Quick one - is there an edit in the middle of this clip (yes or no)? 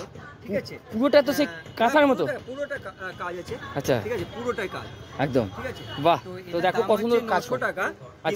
no